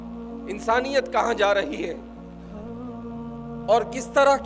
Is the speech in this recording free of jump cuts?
no; 2 cuts; at 2.0 s, 3.4 s

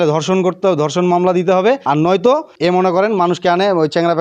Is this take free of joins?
no; 2 cuts; at 1.8 s, 2.5 s

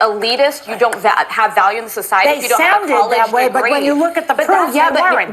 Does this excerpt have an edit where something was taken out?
no; 0 cuts

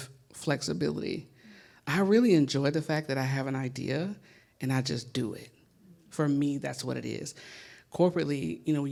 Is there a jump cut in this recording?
no; 0 cuts

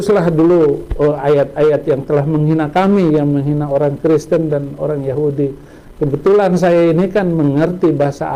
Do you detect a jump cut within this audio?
no; 0 cuts

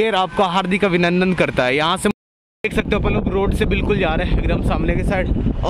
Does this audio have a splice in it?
yes; 1 cut; at 2.1 s

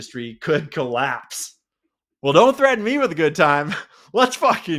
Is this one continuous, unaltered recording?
yes; 0 cuts

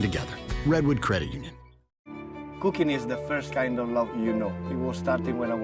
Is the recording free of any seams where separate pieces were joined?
yes; 0 cuts

